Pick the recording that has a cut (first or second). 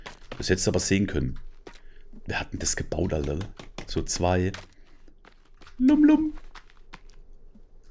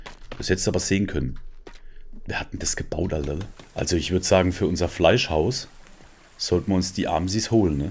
second